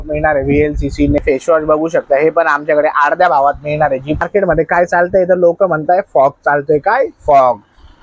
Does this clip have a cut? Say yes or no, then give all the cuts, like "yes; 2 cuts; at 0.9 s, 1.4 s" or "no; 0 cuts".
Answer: yes; 2 cuts; at 1.2 s, 4.2 s